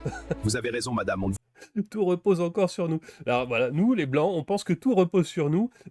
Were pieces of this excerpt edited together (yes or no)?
no